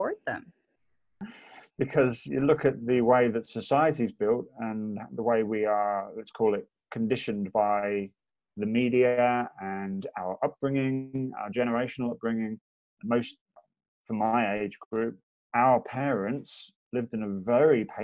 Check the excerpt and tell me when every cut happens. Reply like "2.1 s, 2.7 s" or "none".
1.0 s